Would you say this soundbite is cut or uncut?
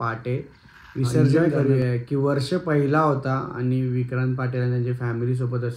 cut